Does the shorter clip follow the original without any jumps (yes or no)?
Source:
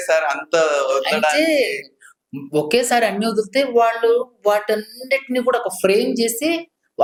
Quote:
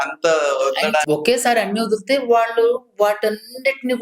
no